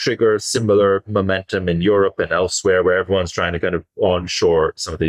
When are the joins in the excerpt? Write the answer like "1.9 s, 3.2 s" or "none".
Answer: none

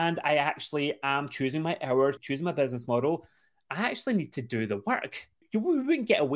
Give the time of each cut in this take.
2.2 s, 5.4 s

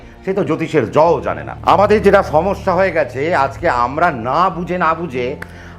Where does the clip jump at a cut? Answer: 1.5 s

